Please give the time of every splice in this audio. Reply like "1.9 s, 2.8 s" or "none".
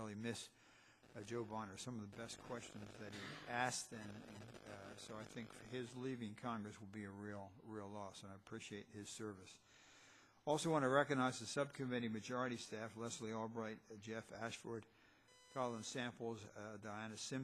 9.7 s